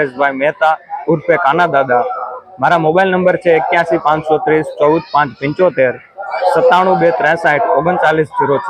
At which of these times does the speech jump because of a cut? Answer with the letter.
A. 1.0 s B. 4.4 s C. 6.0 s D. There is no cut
D